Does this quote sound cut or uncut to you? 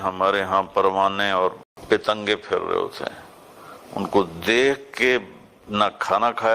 cut